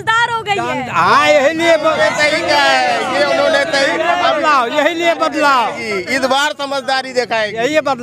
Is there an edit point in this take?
no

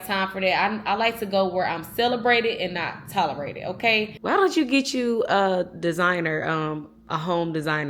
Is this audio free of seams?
no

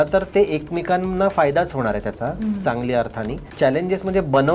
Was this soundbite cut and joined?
yes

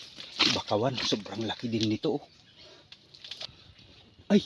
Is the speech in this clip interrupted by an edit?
yes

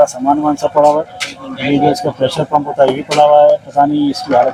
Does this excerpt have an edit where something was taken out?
no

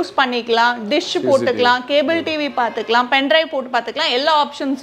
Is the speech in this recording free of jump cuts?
yes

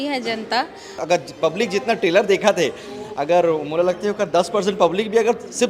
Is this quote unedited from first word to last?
no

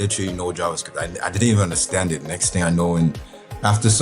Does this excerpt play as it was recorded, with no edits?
yes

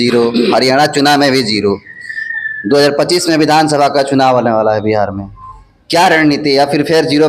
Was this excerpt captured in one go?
yes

